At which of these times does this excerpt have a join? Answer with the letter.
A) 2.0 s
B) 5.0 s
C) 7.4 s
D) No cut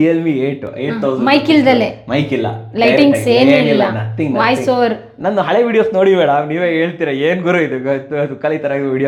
D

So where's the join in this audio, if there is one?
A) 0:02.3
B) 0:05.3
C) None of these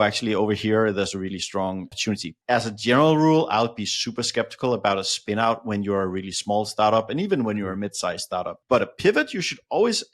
A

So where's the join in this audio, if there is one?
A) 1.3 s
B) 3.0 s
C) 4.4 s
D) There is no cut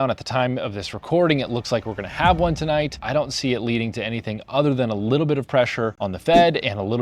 B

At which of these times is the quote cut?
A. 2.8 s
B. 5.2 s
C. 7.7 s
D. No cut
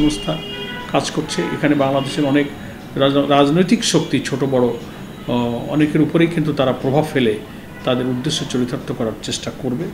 D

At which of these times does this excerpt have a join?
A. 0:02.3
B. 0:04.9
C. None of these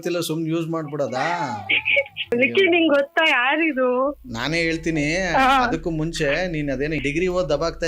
A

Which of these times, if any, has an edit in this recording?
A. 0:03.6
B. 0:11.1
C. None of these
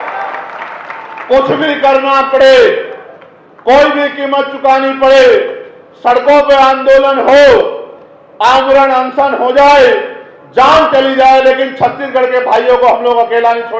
C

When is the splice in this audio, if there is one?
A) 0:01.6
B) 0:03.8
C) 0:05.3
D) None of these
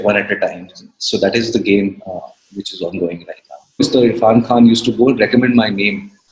B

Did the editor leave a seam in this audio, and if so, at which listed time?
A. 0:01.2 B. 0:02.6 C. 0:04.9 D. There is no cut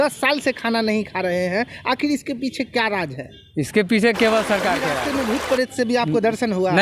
C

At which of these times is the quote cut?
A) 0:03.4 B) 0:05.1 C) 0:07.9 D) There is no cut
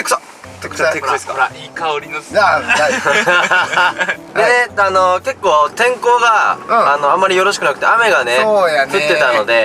D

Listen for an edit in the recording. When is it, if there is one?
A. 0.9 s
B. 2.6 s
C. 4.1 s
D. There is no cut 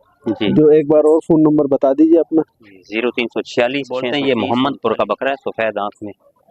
C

